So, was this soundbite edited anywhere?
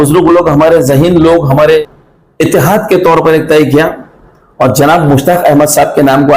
yes; 1 cut; at 1.8 s

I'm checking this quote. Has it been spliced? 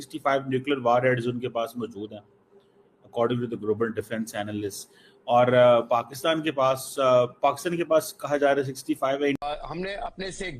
yes; 1 cut; at 9.4 s

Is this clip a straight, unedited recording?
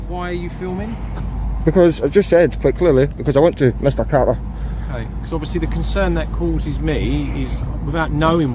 yes; 0 cuts

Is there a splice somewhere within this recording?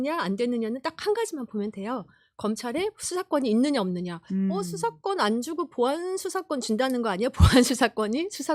no; 0 cuts

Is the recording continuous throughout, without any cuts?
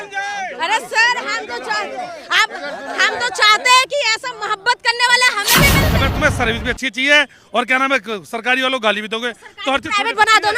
no; 1 cut; at 5.9 s

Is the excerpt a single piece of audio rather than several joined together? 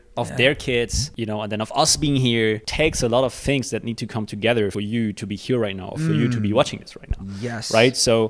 no; 3 cuts; at 1.1 s, 2.7 s, 4.7 s

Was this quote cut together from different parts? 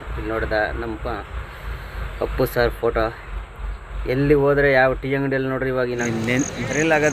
yes; 1 cut; at 6.0 s

